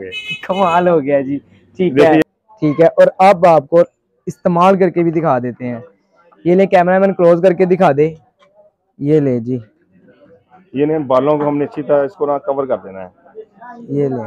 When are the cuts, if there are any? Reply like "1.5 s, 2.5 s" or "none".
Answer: 2.2 s